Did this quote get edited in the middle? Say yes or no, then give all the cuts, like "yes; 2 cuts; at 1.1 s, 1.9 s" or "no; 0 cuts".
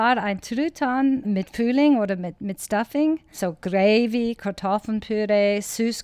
yes; 2 cuts; at 1.2 s, 3.3 s